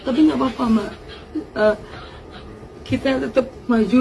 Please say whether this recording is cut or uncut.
uncut